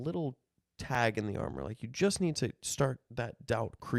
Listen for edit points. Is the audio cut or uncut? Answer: uncut